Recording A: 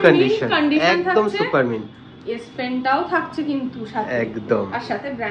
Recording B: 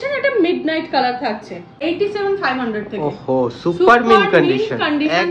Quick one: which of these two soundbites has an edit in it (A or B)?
B